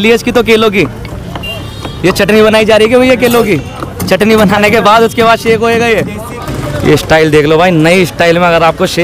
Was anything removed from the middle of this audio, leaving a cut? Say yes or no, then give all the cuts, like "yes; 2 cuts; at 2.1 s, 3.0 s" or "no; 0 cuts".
yes; 1 cut; at 6.5 s